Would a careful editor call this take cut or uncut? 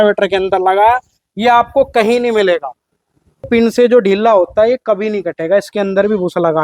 cut